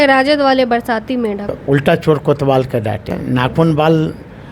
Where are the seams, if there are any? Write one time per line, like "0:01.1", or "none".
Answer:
0:01.6
0:03.2